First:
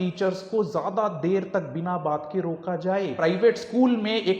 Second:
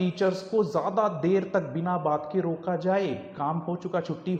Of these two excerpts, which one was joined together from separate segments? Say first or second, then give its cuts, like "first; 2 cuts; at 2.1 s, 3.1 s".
first; 1 cut; at 3.2 s